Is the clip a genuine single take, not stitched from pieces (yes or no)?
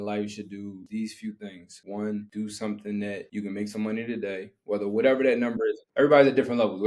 no